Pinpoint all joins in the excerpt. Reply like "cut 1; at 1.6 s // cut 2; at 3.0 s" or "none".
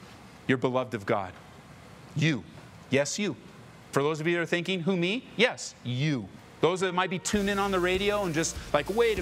cut 1; at 3.9 s // cut 2; at 6.4 s